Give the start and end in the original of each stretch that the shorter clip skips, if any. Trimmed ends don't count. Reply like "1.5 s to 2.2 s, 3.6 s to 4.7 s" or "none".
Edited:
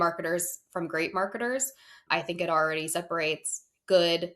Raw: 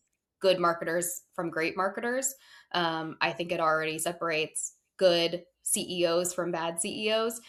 2.6 s to 3.1 s